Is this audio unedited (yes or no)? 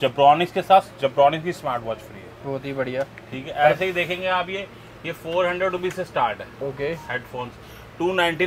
yes